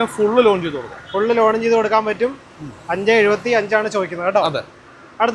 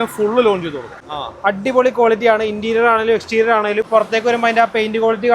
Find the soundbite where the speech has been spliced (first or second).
second